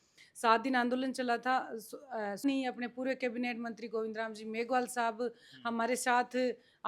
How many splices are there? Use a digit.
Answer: 1